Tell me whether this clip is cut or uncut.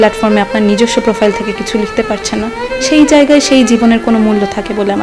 uncut